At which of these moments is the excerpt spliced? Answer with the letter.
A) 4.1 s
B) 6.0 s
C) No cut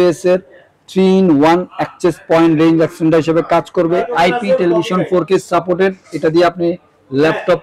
A